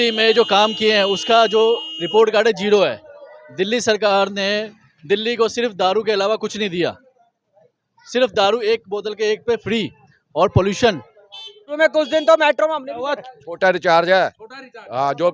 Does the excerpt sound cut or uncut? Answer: cut